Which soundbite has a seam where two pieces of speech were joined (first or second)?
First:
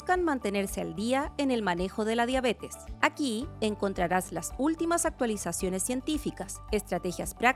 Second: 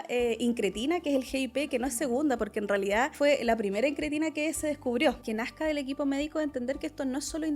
second